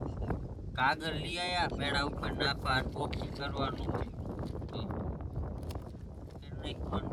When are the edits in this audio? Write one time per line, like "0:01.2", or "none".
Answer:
none